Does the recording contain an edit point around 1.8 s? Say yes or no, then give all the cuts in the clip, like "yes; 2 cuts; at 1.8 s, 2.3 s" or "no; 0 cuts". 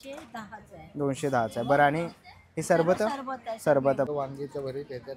no; 1 cut; at 4.1 s